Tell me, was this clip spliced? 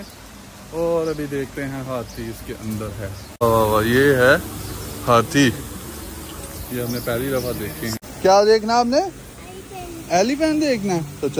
yes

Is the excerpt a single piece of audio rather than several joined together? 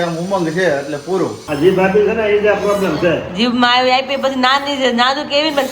no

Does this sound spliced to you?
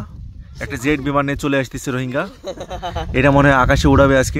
no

